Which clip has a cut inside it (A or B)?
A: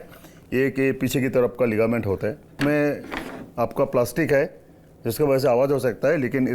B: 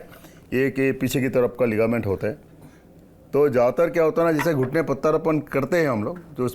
A